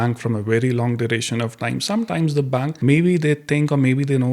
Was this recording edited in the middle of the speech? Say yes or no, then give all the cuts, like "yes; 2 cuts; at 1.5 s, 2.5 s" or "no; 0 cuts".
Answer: yes; 1 cut; at 2.7 s